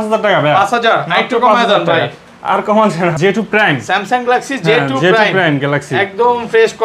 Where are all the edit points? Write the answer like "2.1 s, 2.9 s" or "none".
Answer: 3.1 s